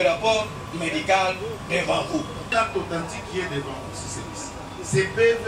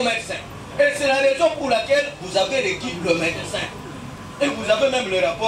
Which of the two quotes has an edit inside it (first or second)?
first